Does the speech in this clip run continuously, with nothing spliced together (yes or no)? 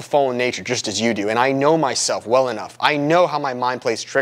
yes